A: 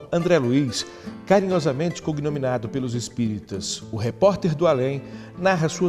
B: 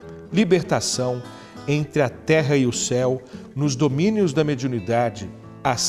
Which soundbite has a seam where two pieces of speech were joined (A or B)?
A